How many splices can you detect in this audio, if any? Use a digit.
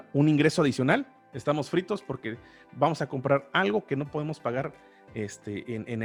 0